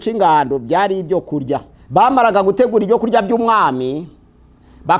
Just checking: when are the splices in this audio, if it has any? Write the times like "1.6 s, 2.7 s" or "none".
1.7 s